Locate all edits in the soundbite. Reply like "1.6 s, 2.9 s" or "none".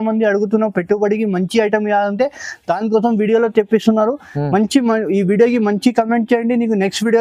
none

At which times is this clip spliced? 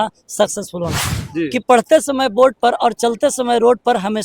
1.2 s

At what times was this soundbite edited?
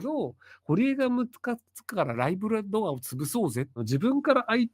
3.8 s

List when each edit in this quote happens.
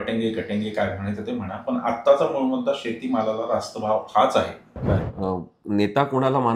5.1 s

